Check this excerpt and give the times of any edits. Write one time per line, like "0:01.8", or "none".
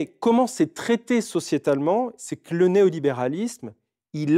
0:02.2